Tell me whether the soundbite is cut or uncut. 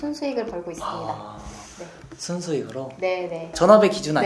uncut